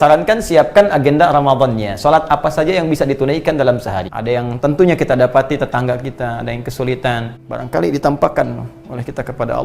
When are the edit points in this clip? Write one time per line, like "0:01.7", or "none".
0:04.1
0:07.4